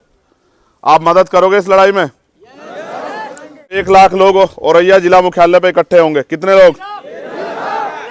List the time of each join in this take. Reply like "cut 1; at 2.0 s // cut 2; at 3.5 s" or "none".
cut 1; at 3.8 s